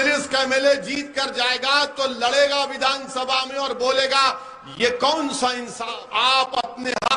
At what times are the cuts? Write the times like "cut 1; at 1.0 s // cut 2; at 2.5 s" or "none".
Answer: cut 1; at 5.9 s